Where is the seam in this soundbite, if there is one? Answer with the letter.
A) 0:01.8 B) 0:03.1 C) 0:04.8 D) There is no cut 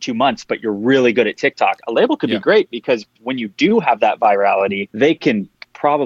C